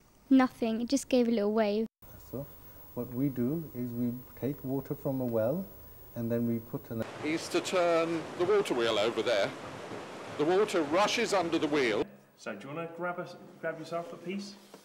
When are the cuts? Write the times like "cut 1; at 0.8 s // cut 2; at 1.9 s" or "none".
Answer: cut 1; at 2.0 s // cut 2; at 6.9 s // cut 3; at 12.0 s